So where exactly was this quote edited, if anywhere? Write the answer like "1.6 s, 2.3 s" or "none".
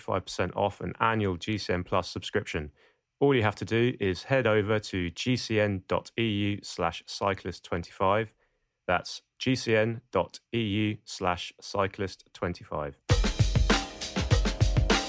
13.0 s